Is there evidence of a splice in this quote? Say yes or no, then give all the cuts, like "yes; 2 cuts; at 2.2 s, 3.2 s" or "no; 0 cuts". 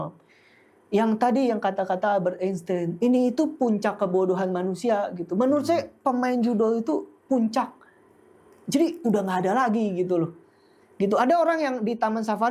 no; 0 cuts